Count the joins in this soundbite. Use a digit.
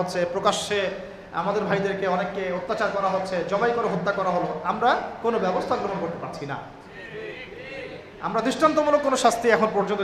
0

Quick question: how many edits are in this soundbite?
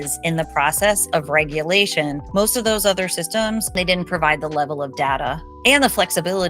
2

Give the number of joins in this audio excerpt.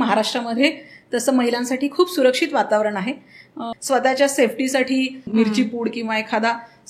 2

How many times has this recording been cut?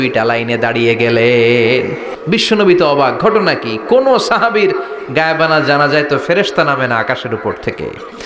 1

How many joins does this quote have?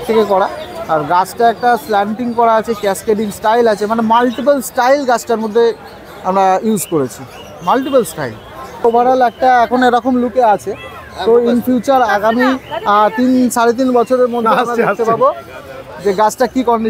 1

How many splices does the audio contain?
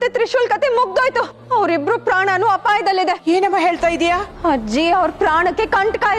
3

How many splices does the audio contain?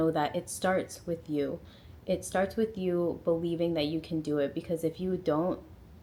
0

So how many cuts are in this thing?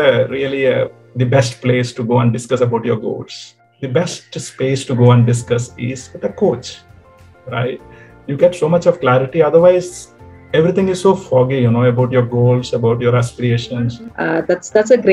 2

